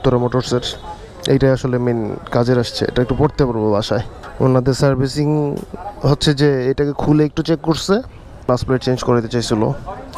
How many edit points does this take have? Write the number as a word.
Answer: two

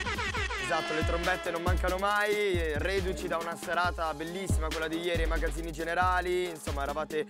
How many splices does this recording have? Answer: one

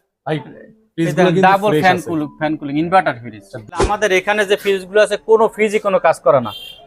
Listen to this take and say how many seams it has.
one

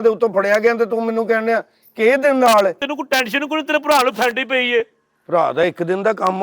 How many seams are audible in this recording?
one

